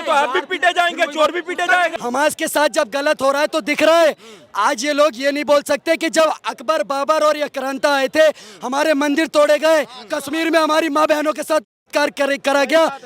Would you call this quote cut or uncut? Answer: cut